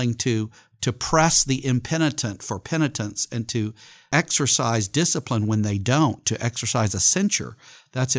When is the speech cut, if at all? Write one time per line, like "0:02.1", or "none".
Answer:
0:03.9